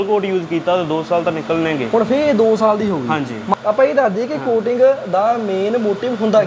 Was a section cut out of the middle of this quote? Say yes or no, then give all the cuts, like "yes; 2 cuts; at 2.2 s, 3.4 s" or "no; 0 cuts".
yes; 1 cut; at 3.5 s